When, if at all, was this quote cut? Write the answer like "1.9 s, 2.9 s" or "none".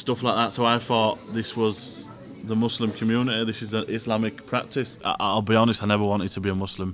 5.0 s

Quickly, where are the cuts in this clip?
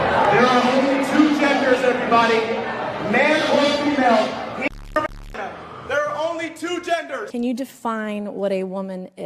7.3 s

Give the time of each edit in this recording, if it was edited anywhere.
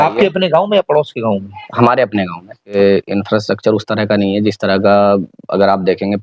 2.8 s

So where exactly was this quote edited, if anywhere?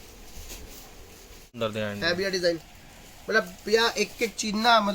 1.6 s

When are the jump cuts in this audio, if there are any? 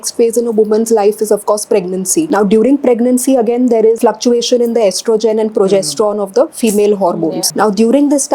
2.3 s, 4.0 s, 7.4 s

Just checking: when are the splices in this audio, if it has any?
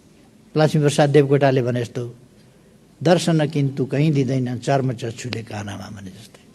none

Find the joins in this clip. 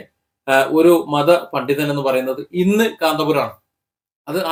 none

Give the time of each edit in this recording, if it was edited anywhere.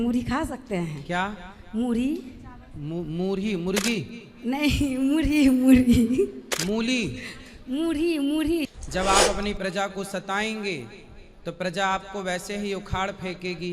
8.7 s

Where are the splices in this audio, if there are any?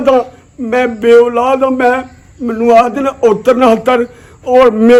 none

